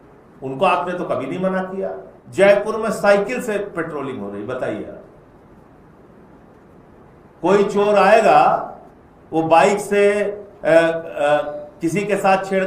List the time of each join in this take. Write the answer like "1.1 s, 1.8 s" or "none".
2.1 s